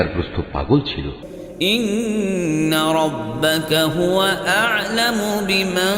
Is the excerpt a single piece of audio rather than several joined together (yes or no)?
no